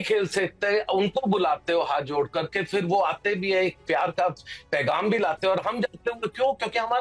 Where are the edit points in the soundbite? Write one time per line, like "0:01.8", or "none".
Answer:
none